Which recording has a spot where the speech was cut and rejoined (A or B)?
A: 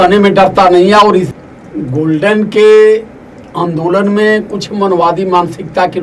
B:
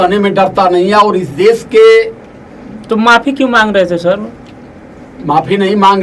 A